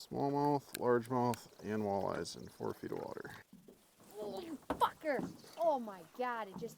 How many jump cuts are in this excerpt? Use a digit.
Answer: 1